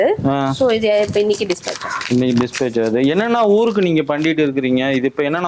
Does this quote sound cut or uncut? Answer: uncut